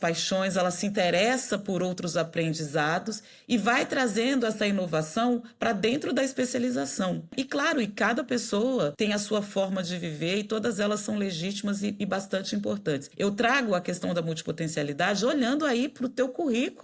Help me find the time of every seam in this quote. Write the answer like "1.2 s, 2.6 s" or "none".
7.3 s, 8.9 s, 13.1 s